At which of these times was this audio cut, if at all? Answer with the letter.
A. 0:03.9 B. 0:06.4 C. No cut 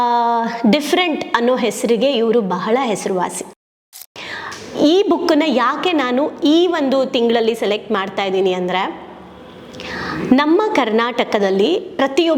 A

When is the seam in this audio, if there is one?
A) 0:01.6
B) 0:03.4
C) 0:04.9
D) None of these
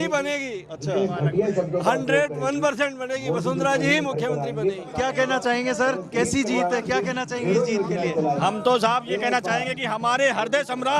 C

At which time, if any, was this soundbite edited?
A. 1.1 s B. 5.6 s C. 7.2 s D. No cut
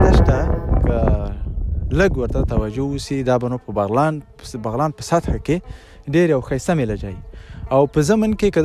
D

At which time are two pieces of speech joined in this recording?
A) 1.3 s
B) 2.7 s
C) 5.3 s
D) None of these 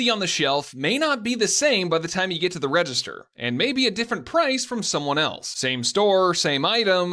D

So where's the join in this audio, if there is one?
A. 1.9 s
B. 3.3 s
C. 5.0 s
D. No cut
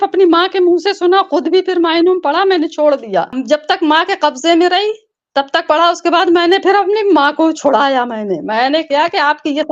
B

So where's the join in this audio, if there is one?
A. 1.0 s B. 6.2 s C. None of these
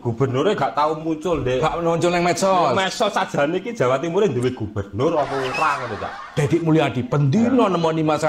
B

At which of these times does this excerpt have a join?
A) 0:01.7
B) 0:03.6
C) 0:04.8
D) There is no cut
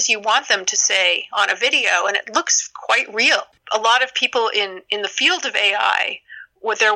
B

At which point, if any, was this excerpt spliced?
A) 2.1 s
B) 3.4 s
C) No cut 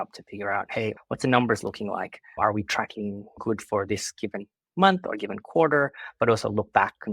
B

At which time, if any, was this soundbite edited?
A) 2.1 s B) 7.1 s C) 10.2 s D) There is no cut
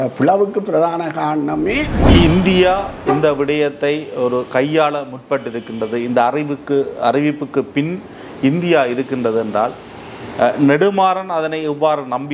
A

